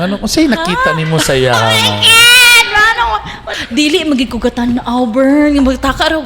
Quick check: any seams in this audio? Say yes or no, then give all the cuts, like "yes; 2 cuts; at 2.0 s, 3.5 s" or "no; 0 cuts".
yes; 1 cut; at 3.4 s